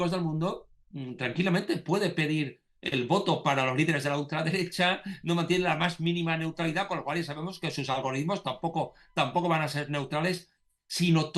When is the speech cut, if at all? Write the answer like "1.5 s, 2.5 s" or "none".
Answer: none

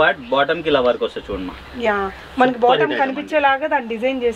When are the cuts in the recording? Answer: none

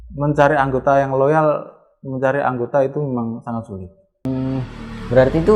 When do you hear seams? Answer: 4.2 s

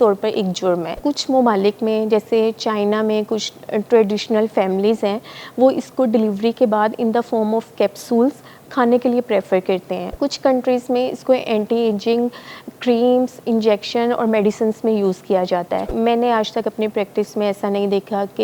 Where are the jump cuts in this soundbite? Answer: 0.9 s, 10.1 s, 15.9 s

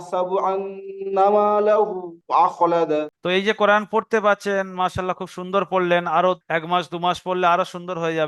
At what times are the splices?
3.1 s

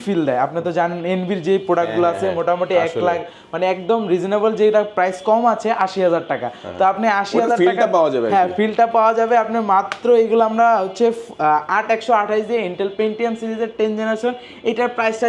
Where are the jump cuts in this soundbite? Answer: none

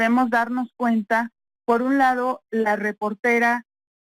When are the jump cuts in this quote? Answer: 1.2 s

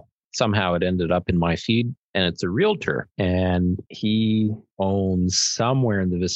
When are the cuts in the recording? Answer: 2.1 s, 3.1 s, 3.9 s, 4.6 s

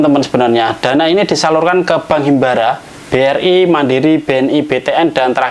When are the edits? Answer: none

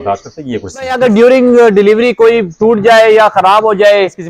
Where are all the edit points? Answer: 0.9 s

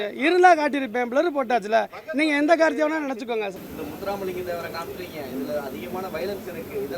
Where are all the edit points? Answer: 3.6 s

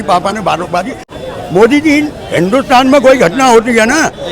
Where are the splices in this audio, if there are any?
1.0 s

